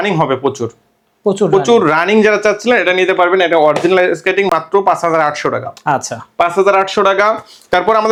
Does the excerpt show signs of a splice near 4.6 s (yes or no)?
no